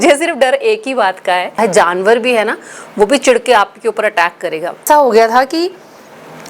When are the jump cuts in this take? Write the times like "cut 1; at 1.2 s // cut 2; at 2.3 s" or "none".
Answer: cut 1; at 1.6 s // cut 2; at 4.8 s